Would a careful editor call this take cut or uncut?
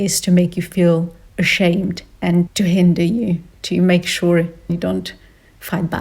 cut